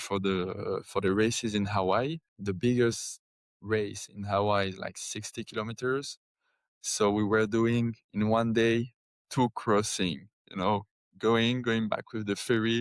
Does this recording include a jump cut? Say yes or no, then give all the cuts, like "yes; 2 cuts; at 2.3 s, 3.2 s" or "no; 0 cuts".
yes; 1 cut; at 2.3 s